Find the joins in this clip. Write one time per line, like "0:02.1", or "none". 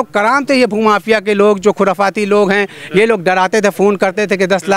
none